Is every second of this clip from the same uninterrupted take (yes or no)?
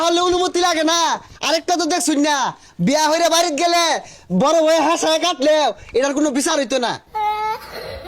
no